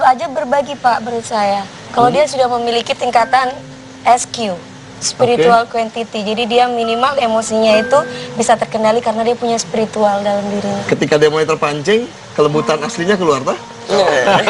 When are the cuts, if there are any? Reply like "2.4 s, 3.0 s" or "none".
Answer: none